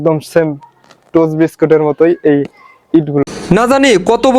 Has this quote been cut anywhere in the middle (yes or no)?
yes